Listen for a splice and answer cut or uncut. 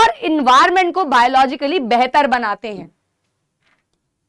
uncut